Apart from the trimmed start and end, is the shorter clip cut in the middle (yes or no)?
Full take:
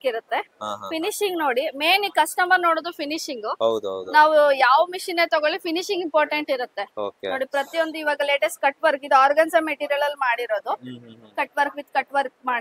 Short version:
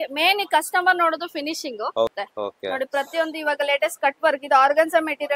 yes